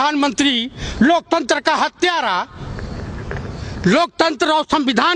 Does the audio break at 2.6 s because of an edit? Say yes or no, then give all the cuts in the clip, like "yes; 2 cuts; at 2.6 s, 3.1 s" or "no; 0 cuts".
no; 0 cuts